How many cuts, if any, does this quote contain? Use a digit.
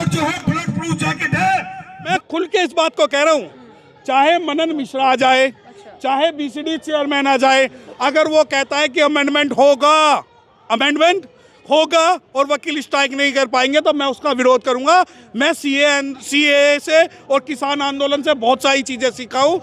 1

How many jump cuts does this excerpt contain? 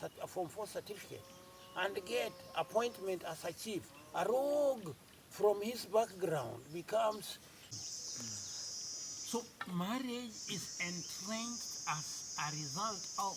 1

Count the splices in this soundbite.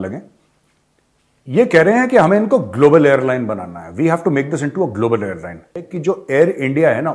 1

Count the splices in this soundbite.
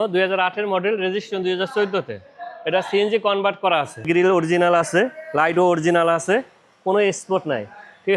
1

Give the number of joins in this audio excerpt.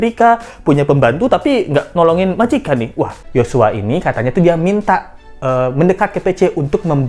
1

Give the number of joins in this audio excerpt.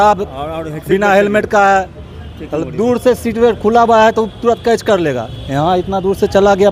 0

